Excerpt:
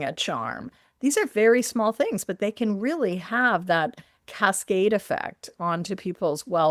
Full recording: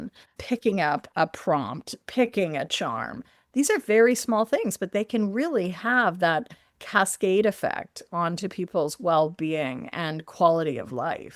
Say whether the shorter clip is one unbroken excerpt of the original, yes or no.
yes